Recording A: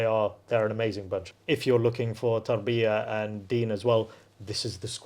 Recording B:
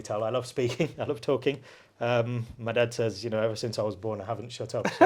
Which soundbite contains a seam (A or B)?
A